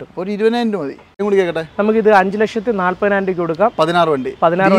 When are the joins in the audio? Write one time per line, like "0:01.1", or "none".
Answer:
0:01.2